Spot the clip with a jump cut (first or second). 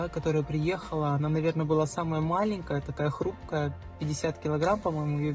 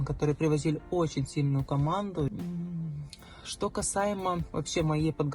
second